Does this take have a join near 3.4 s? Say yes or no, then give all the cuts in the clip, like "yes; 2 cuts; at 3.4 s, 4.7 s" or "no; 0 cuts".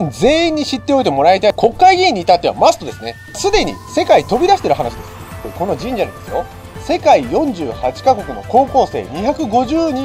yes; 3 cuts; at 1.6 s, 3.4 s, 5.5 s